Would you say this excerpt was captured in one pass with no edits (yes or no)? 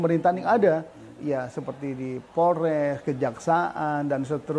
yes